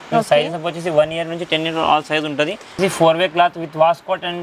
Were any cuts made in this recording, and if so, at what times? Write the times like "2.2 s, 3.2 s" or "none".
2.8 s